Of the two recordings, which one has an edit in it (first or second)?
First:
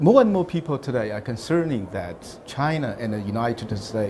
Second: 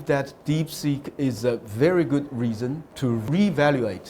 second